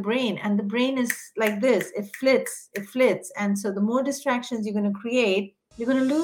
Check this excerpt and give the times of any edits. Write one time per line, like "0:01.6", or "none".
none